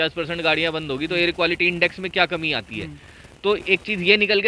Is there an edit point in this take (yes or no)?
no